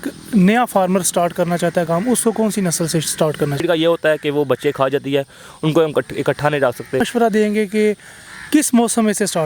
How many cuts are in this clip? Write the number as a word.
two